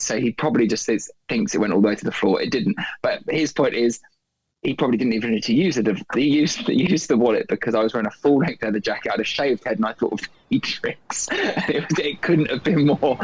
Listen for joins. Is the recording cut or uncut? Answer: uncut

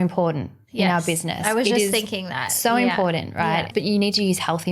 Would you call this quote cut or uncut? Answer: cut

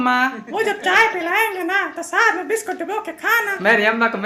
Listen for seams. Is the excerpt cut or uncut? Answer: uncut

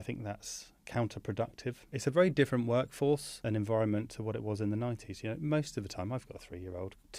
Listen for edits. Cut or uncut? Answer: uncut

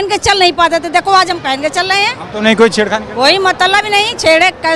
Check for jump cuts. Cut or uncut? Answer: uncut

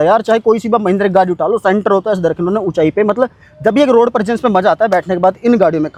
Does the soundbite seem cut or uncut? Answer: uncut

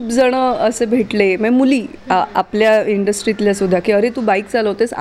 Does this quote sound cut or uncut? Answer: uncut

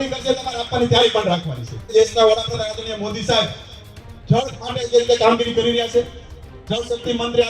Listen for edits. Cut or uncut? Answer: cut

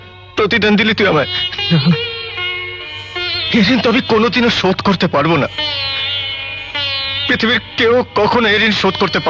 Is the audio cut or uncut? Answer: uncut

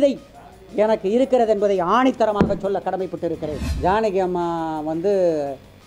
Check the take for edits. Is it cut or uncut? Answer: cut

